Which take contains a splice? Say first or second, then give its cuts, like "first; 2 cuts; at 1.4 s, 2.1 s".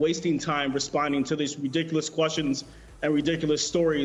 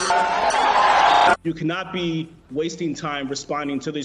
second; 1 cut; at 1.4 s